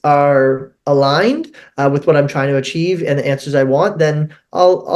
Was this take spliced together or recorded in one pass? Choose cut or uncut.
uncut